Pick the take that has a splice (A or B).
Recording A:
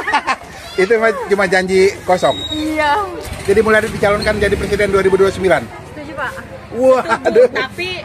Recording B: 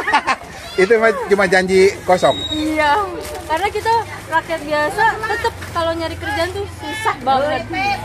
A